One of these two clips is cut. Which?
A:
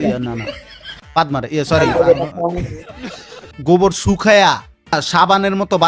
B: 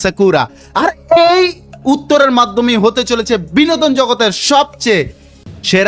A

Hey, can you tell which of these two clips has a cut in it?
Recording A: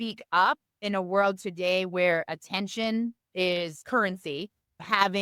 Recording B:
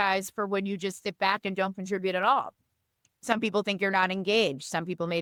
A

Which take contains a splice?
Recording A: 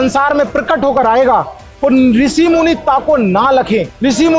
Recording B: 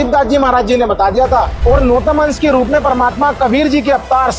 B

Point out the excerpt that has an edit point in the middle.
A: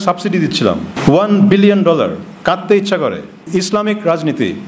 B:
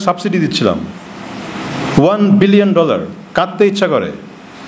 A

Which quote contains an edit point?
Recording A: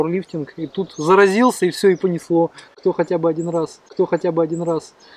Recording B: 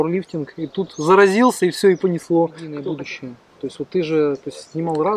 B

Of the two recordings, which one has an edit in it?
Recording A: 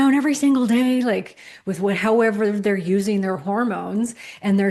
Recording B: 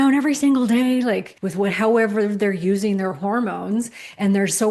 B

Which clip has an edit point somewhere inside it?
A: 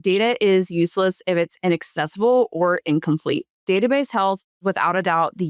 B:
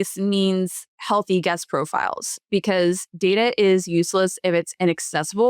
A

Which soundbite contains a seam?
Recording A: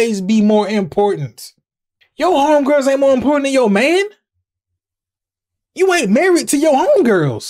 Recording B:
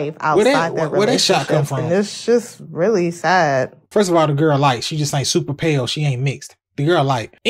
B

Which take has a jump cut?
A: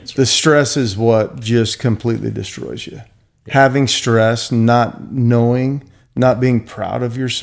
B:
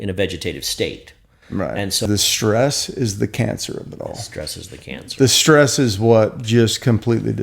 B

